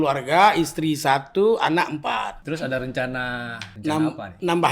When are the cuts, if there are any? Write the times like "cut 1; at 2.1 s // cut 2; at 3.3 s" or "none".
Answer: cut 1; at 2.4 s // cut 2; at 3.6 s